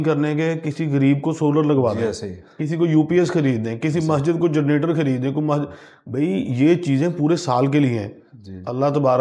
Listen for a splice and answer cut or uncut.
uncut